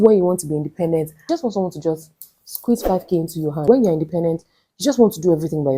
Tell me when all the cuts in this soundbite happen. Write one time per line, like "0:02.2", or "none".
0:01.2
0:03.6